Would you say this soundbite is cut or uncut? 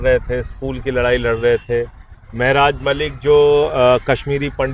uncut